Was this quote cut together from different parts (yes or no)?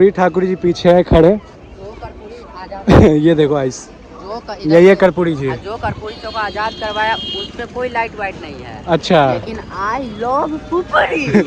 no